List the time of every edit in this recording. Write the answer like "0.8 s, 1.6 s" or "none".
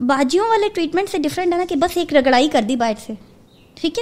none